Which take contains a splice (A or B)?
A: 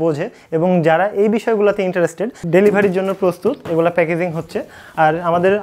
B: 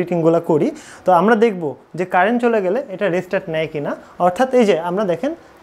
A